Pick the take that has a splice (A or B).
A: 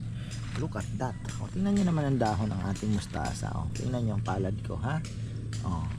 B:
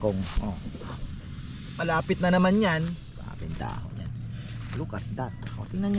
B